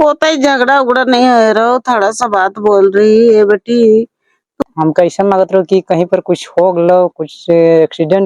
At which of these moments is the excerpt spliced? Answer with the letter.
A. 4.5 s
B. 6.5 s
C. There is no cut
A